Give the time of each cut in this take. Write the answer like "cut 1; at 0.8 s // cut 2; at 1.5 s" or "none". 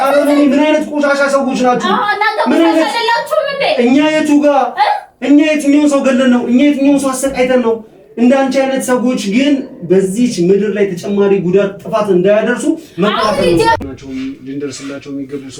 cut 1; at 13.8 s